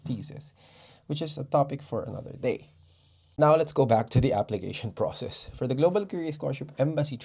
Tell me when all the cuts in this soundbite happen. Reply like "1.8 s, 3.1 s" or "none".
none